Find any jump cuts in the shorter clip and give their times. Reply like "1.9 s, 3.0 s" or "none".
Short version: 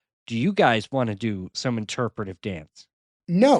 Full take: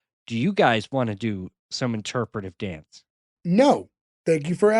1.5 s